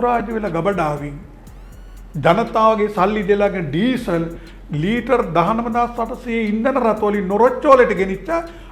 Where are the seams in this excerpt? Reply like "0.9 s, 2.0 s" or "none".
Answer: none